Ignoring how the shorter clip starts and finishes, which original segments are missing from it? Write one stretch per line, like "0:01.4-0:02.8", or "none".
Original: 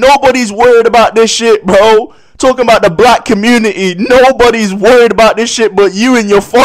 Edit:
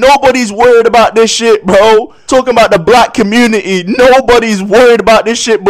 0:02.2-0:02.3

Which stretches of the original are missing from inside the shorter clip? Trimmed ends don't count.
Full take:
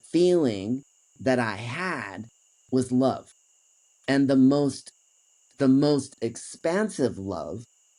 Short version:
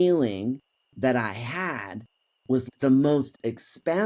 0:02.9-0:05.4

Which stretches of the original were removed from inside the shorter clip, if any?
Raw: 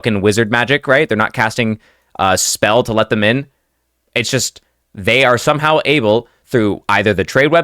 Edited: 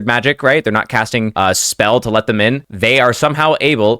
0:01.8-0:02.1
0:03.5-0:04.9

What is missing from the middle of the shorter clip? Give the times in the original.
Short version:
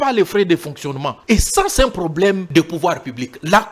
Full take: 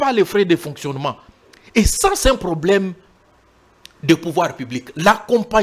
0:01.1-0:01.6
0:02.9-0:04.0

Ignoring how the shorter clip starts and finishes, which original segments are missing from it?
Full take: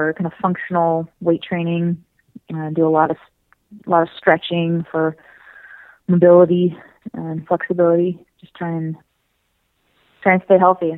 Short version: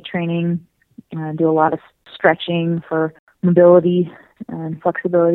0:03.5-0:04.1
0:05.3-0:05.9

